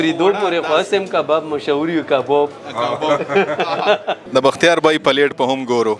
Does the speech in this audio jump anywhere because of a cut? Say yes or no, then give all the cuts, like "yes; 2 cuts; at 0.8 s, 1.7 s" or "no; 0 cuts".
yes; 1 cut; at 4.2 s